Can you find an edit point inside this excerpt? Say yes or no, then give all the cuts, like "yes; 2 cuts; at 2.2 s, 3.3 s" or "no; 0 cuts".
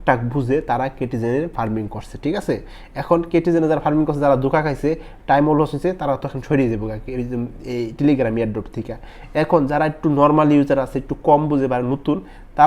no; 0 cuts